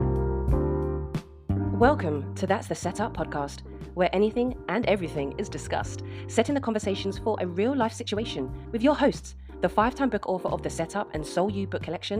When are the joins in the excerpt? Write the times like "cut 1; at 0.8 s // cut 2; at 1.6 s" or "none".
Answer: cut 1; at 1.3 s